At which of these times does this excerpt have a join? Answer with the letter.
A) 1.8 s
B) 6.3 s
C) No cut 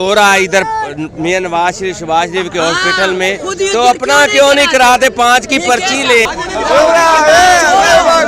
B